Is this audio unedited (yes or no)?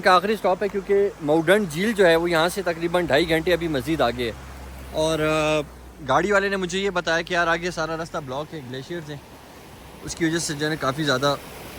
yes